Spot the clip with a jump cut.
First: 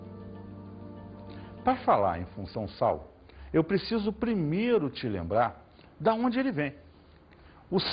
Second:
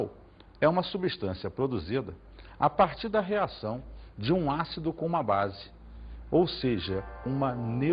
first; 1 cut; at 4.5 s

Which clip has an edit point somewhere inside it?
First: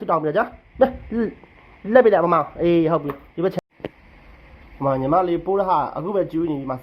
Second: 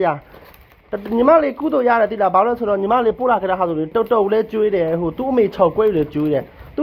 first; 1 cut; at 3.5 s

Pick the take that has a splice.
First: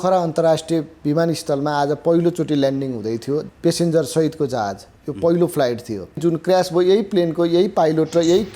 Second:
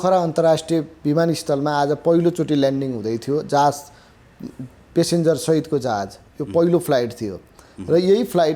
first; 2 cuts; at 3.4 s, 6.2 s

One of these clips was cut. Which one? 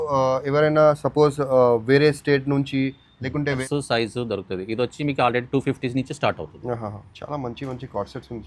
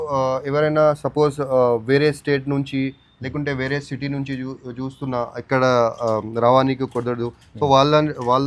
first; 1 cut; at 3.6 s

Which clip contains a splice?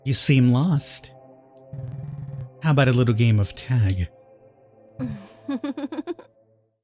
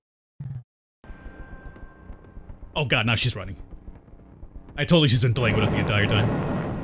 second; 1 cut; at 1.1 s

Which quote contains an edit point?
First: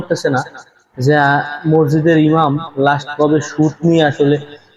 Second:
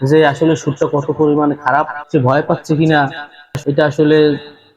second; 1 cut; at 2.0 s

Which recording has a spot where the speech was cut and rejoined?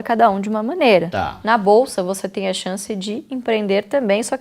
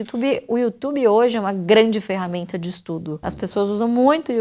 first; 1 cut; at 1.1 s

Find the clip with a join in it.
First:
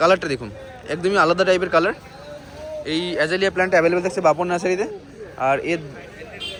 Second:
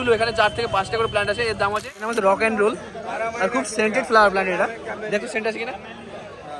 second; 1 cut; at 2.0 s

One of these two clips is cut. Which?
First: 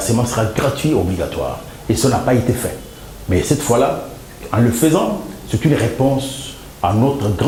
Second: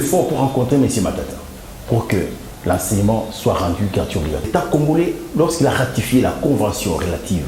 second; 1 cut; at 4.5 s

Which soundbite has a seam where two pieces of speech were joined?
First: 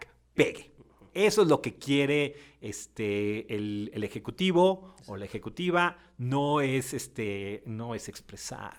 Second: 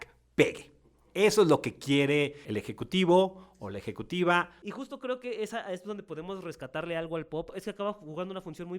second; 3 cuts; at 2.5 s, 4.6 s, 7.5 s

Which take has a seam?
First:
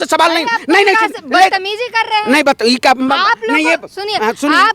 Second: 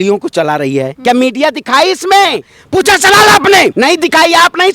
second; 3 cuts; at 0.9 s, 2.5 s, 3.7 s

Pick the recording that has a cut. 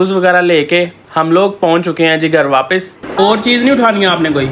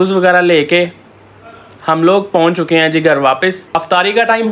first; 2 cuts; at 1.0 s, 3.0 s

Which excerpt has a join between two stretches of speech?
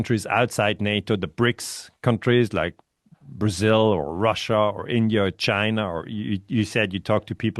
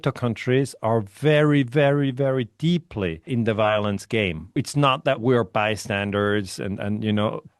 second; 2 cuts; at 3.3 s, 4.6 s

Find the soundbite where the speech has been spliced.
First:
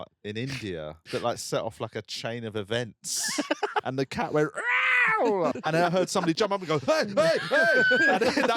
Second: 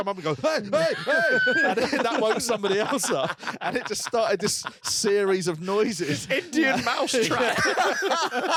first; 3 cuts; at 1.0 s, 3.8 s, 5.5 s

